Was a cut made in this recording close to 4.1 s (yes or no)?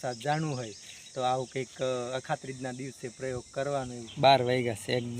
yes